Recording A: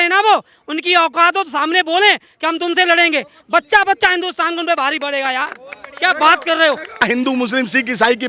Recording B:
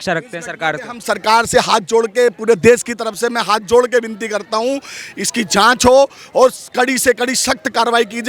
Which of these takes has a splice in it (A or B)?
A